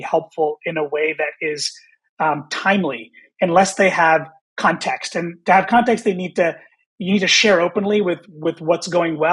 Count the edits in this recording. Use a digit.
0